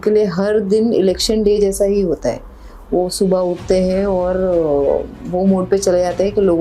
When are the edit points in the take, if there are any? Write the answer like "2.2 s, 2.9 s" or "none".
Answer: none